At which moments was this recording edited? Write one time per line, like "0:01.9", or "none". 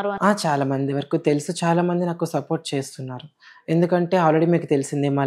none